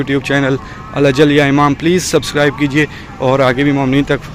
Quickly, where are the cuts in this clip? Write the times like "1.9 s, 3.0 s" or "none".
none